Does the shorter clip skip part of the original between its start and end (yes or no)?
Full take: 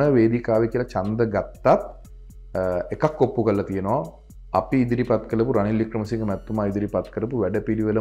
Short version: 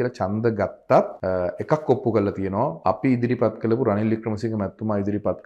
yes